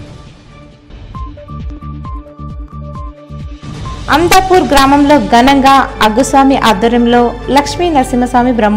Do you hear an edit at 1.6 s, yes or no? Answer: yes